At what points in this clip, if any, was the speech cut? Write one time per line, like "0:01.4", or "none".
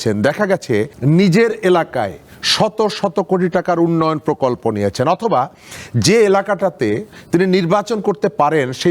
0:00.9